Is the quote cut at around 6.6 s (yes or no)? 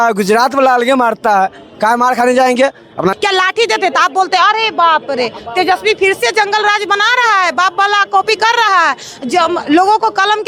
no